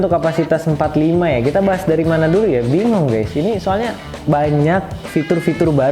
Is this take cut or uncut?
cut